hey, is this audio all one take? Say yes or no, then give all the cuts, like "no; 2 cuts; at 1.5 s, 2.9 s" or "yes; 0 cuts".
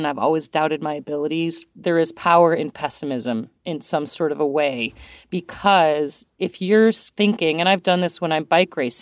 no; 3 cuts; at 1.6 s, 6.2 s, 7.1 s